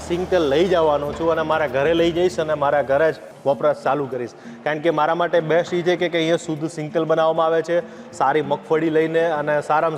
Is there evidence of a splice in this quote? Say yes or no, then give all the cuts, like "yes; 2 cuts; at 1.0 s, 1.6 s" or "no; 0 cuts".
yes; 1 cut; at 3.3 s